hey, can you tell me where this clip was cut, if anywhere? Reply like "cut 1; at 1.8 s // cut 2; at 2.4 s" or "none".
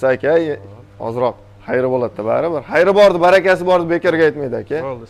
none